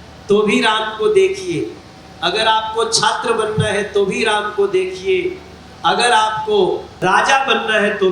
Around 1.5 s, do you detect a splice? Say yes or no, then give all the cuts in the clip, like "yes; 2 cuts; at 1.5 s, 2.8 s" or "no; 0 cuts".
no; 1 cut; at 6.9 s